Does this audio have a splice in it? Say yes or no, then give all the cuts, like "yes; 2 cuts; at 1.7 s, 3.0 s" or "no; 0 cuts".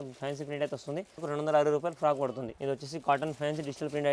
yes; 2 cuts; at 1.2 s, 2.5 s